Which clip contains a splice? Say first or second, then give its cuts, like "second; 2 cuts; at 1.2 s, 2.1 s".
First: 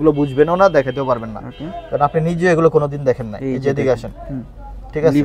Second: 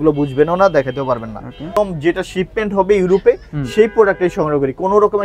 second; 1 cut; at 1.8 s